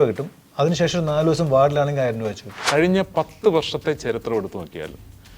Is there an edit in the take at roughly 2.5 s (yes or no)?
yes